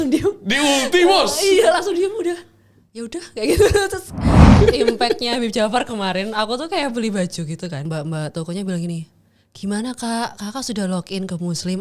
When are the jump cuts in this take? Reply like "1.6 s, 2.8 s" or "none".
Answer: 4.6 s, 7.9 s